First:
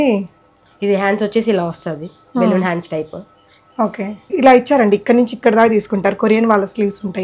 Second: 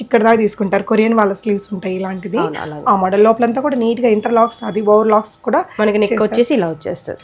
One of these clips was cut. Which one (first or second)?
first